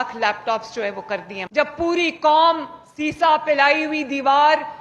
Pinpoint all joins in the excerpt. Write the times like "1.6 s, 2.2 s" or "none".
1.4 s